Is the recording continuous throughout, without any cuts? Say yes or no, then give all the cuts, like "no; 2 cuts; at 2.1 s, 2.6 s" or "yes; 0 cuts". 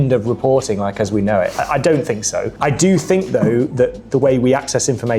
no; 1 cut; at 2.5 s